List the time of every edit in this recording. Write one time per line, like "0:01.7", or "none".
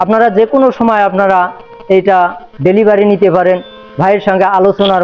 none